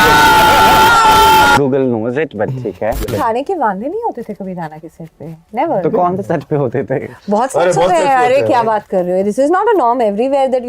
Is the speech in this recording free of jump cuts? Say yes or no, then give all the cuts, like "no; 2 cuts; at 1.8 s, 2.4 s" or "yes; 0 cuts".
no; 2 cuts; at 1.6 s, 3.1 s